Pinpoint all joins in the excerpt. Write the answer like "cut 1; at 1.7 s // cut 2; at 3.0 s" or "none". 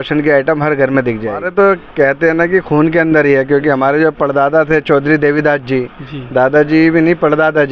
cut 1; at 1.5 s